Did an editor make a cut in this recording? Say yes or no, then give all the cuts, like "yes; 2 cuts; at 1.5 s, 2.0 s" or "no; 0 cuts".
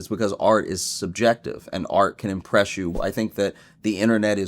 yes; 1 cut; at 3.0 s